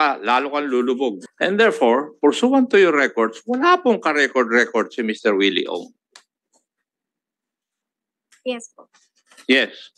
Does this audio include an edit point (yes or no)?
yes